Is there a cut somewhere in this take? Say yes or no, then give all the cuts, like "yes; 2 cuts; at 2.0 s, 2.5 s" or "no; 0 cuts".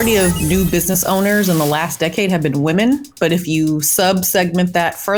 no; 0 cuts